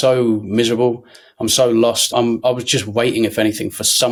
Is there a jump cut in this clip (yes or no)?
no